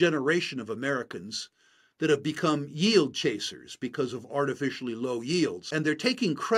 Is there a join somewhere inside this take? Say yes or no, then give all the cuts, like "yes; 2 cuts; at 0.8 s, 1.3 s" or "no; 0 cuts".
yes; 1 cut; at 5.6 s